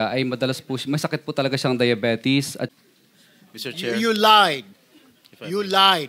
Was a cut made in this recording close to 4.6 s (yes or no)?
no